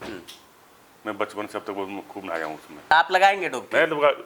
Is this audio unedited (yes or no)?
no